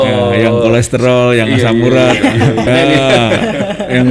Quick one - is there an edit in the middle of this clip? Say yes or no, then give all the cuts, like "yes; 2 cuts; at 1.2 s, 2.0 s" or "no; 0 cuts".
yes; 1 cut; at 2.7 s